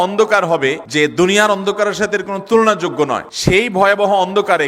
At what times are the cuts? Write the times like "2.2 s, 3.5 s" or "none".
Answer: 0.8 s, 3.3 s